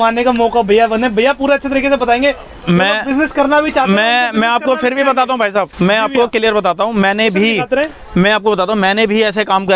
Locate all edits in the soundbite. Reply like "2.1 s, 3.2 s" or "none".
none